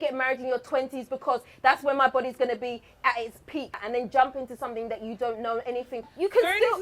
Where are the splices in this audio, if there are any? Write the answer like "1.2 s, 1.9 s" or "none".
3.8 s, 6.0 s